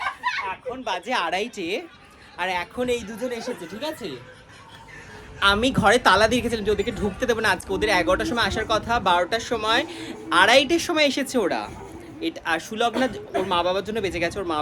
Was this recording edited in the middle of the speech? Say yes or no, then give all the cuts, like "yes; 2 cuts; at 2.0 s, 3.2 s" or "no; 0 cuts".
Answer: no; 0 cuts